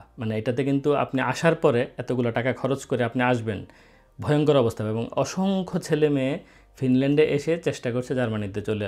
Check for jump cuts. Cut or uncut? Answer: uncut